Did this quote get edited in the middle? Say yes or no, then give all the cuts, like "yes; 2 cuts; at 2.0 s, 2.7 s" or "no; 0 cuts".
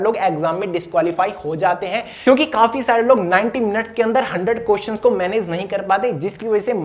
no; 0 cuts